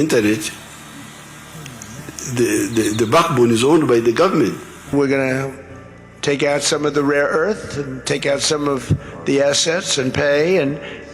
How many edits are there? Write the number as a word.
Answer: one